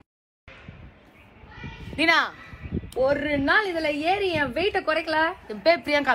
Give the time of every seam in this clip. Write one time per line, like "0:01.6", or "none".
none